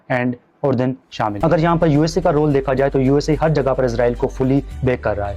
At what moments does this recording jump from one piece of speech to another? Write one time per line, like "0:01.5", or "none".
0:01.4